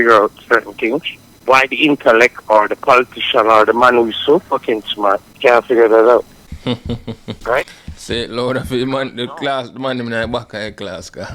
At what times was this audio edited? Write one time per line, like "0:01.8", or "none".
none